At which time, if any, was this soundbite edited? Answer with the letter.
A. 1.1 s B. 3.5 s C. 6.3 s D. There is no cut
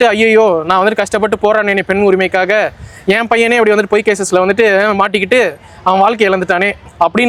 D